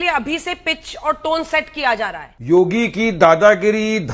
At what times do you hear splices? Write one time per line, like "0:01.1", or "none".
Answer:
0:02.3